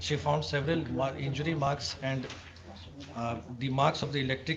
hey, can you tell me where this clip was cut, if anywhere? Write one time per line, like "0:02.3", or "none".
none